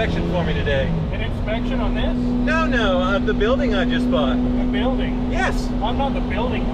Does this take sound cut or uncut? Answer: uncut